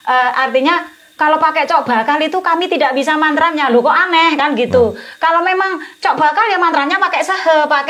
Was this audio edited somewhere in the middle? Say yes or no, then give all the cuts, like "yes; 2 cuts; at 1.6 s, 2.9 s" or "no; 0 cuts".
no; 0 cuts